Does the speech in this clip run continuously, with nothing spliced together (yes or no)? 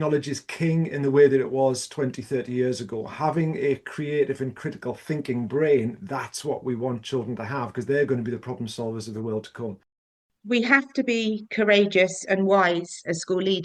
no